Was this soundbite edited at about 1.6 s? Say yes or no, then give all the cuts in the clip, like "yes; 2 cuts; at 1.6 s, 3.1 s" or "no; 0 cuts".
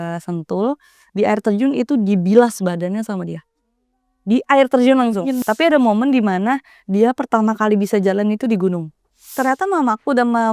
no; 2 cuts; at 5.4 s, 9.2 s